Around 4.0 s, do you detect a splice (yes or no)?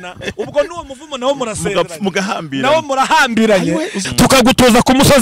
yes